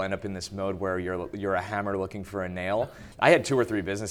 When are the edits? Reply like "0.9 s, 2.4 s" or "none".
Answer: 3.0 s